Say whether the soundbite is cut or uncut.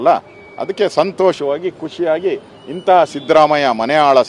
uncut